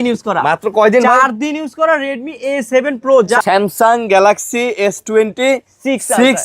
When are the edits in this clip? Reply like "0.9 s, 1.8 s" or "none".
3.4 s